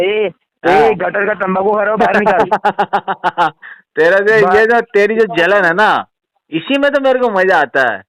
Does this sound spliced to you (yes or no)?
no